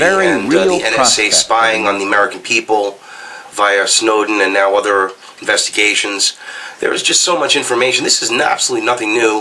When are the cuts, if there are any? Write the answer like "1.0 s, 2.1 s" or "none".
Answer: 5.7 s